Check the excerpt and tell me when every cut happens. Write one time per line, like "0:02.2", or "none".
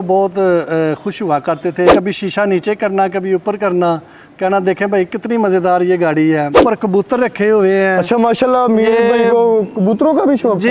0:01.9
0:06.6